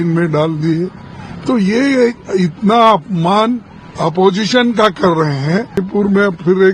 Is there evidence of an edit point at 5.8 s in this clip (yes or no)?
yes